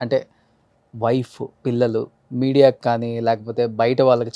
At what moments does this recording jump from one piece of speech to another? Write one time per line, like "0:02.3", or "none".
0:02.2

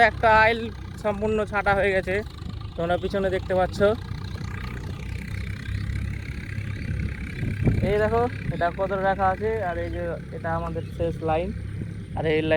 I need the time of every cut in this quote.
none

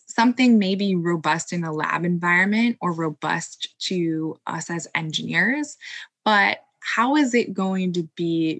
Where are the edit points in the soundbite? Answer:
none

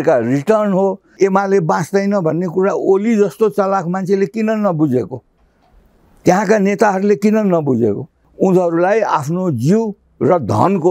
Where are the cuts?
0:01.1
0:08.2

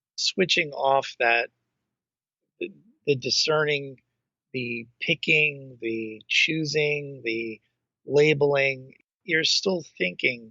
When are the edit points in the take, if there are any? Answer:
0:09.1

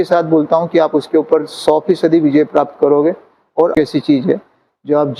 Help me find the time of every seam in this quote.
0:03.7

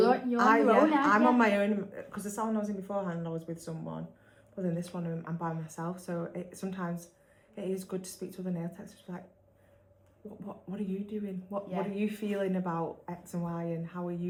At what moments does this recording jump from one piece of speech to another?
none

